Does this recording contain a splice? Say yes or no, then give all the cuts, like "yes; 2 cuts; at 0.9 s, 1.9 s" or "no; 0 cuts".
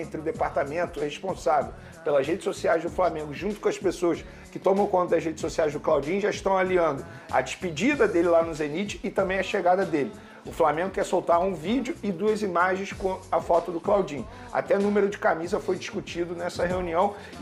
no; 0 cuts